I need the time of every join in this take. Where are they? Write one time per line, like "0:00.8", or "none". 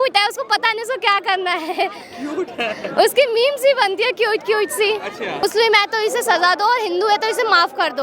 0:05.4

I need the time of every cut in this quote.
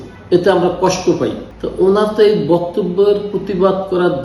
0:01.4

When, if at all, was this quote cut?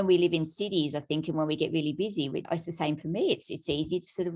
0:02.5

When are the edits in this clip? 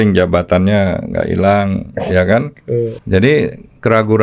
0:03.0

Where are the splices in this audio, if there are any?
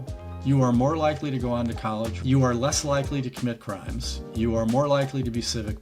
0:02.2

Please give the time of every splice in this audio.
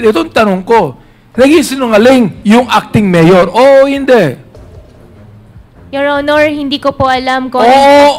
none

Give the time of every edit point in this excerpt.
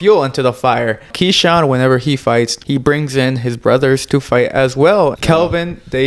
0:01.1
0:02.6
0:05.2

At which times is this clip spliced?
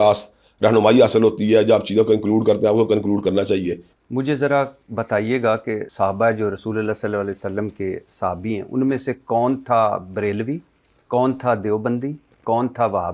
0:03.9
0:05.9

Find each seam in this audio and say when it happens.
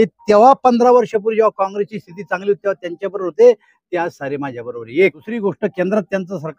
0:05.3

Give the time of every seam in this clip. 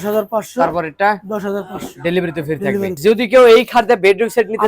0:03.0

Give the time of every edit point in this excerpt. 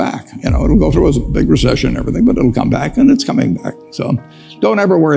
none

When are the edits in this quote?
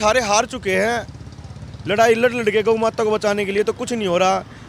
none

